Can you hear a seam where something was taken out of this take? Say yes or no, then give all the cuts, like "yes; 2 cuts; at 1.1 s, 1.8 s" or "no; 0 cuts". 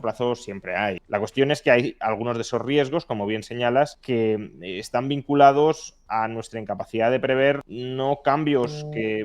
yes; 3 cuts; at 1.0 s, 4.0 s, 7.8 s